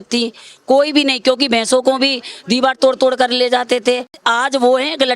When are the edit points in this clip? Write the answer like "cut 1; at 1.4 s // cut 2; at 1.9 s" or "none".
cut 1; at 4.1 s